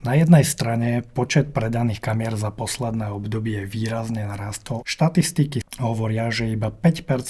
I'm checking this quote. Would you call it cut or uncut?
cut